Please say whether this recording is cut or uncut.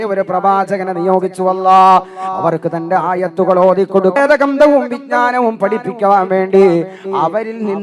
cut